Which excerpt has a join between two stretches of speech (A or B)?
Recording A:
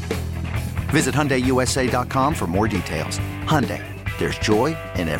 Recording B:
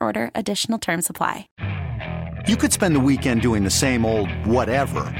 B